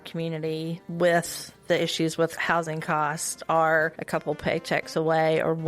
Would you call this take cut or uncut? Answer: cut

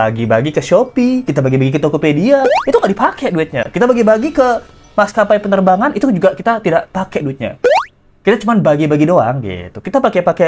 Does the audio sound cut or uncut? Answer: uncut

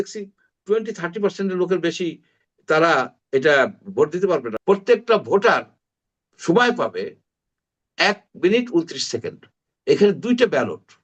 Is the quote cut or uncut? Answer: cut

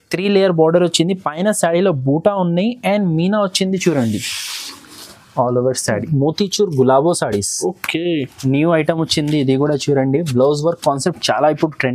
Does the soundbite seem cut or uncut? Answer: cut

